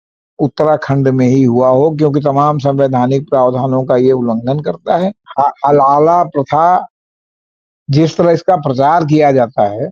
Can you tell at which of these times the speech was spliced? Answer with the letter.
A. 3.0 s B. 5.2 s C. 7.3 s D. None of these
B